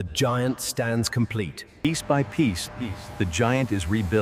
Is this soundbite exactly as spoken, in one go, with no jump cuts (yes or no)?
no